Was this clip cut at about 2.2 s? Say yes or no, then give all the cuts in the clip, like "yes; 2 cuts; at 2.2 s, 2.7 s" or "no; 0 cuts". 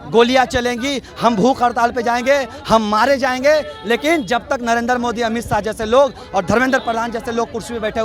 no; 0 cuts